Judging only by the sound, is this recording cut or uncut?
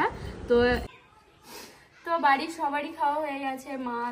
cut